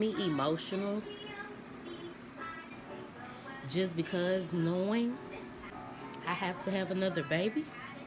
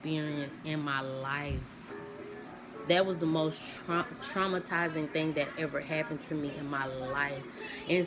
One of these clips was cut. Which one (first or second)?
first